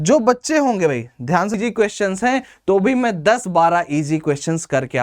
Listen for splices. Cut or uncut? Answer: cut